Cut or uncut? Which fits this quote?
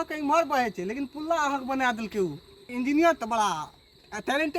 uncut